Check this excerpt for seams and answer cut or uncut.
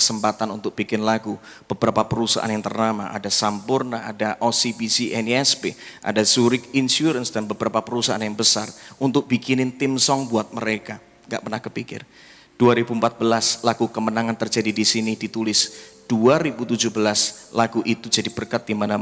uncut